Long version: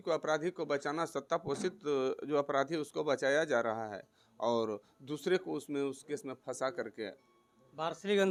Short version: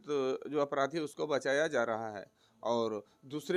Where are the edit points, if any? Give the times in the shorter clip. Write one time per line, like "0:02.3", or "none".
none